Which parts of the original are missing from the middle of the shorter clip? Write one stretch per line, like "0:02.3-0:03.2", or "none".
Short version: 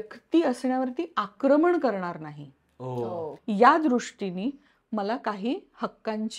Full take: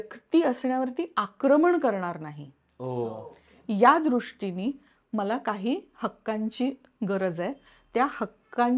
0:03.3-0:03.5